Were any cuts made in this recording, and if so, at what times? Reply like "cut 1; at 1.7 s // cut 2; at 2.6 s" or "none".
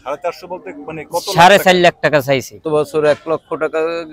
cut 1; at 2.6 s